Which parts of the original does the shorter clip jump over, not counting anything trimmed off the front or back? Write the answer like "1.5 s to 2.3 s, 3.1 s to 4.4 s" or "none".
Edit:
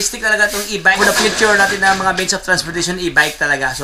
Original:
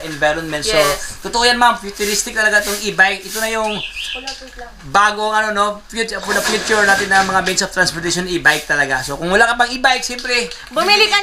3.1 s to 6.3 s